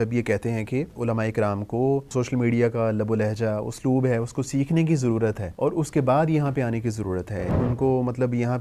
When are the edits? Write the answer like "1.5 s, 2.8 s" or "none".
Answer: 0.9 s, 2.1 s, 5.5 s, 7.5 s